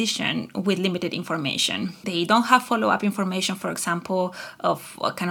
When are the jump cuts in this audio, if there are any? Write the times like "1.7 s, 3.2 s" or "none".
2.0 s